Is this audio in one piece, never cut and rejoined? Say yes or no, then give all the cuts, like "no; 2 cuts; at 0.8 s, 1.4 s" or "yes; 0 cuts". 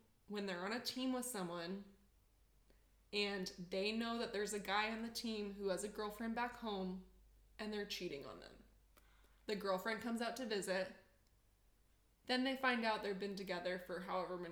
yes; 0 cuts